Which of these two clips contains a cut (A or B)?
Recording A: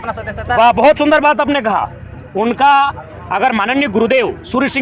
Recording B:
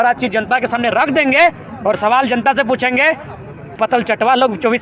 B